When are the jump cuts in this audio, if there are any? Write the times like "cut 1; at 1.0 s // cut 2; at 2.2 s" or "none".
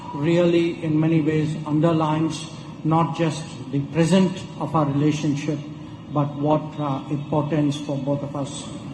none